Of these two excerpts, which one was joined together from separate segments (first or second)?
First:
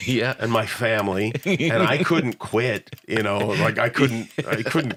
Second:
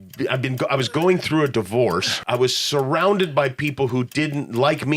second